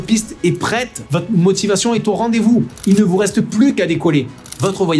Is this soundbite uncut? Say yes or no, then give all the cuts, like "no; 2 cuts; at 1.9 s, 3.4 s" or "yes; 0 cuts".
no; 2 cuts; at 1.0 s, 2.7 s